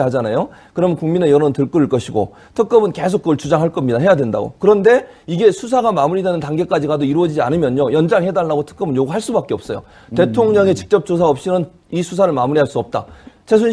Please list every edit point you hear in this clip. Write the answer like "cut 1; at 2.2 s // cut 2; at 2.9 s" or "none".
none